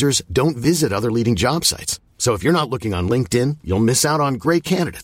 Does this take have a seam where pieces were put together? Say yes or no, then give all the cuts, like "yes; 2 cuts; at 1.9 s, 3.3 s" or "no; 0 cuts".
no; 0 cuts